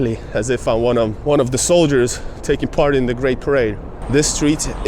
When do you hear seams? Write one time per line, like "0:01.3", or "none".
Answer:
0:01.2
0:03.8